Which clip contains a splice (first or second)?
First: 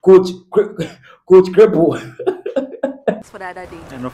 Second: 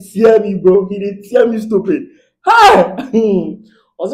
first